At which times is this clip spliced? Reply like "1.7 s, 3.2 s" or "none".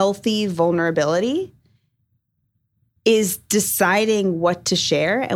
none